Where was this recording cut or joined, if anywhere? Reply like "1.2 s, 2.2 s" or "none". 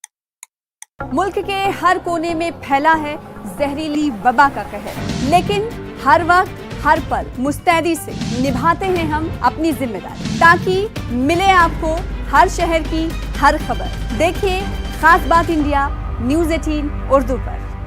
0.9 s